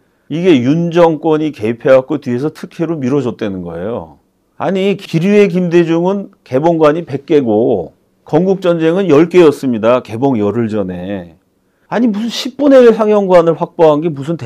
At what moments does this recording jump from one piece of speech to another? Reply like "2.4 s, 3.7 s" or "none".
5.0 s